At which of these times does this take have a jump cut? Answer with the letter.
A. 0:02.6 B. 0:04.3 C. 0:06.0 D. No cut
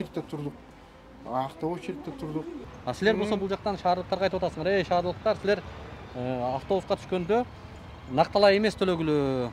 A